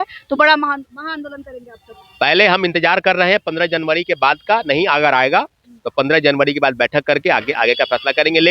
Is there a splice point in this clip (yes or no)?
no